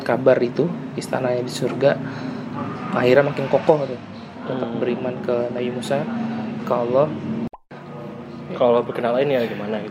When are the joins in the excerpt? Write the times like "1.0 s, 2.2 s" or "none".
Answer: 7.5 s